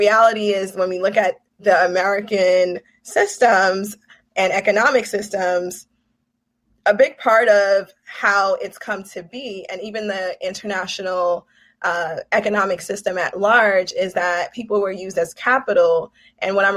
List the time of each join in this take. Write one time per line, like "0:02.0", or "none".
none